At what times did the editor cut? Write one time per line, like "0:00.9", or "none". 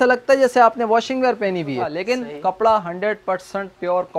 0:01.9